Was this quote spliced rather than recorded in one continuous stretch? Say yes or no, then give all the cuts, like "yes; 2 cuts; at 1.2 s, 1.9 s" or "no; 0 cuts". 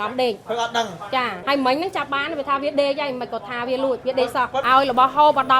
yes; 2 cuts; at 1.3 s, 4.3 s